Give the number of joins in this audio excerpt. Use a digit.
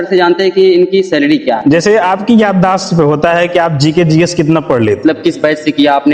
2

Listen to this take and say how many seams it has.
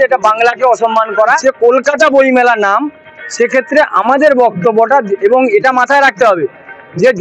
1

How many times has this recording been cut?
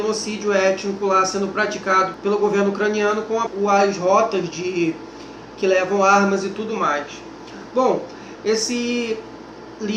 0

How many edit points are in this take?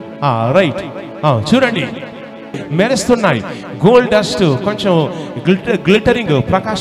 1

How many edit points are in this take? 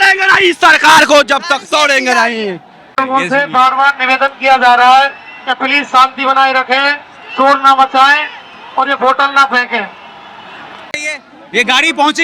2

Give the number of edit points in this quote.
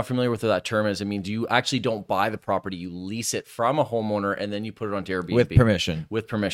0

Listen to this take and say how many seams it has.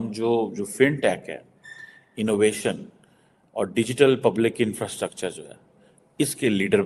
0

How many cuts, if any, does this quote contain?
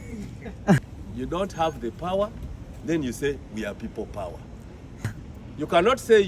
2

